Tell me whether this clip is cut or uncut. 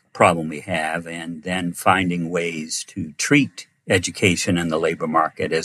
uncut